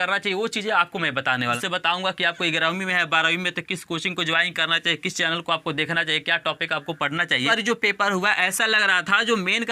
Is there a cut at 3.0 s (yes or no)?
no